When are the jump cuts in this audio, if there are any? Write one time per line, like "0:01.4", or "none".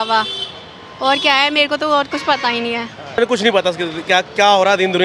0:03.2